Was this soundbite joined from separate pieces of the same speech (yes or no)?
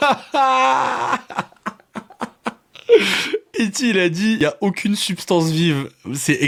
no